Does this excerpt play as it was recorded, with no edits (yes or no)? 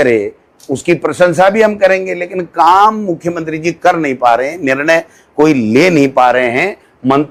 yes